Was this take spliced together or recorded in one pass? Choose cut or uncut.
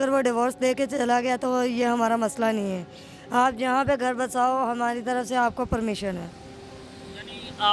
uncut